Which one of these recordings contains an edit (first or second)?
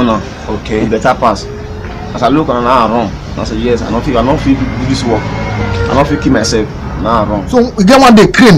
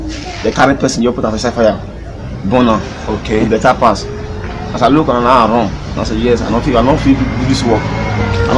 first